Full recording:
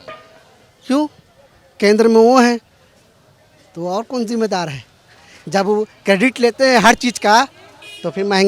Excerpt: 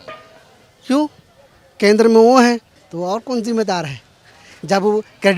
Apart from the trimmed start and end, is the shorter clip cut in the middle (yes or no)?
yes